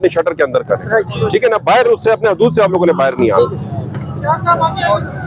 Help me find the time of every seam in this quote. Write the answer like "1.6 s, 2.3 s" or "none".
none